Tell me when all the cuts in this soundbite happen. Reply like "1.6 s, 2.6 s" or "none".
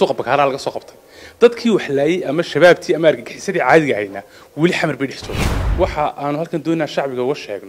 5.2 s